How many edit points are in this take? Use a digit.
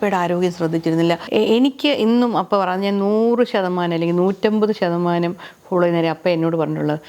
1